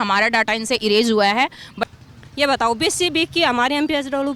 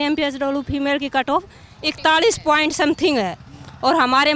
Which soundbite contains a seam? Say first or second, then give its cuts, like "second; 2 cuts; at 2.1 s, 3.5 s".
first; 1 cut; at 1.8 s